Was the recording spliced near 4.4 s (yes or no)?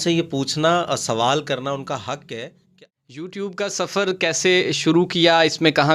no